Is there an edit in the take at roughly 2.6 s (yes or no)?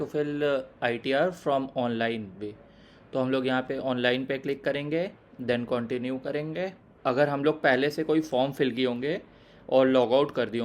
no